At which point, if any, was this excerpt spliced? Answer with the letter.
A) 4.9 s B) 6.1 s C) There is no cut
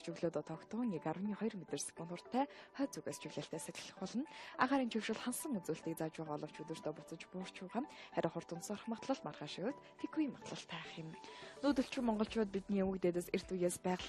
A